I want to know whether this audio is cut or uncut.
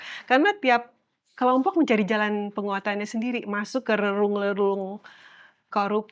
uncut